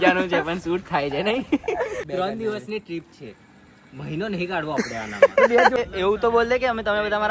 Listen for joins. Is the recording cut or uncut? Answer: cut